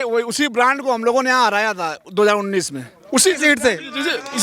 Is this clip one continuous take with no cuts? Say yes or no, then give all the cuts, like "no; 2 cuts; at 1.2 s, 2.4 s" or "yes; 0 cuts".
yes; 0 cuts